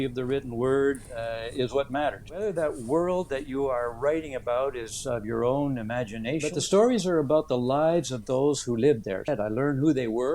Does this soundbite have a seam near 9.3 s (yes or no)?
yes